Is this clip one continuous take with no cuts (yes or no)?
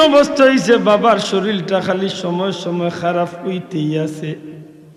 yes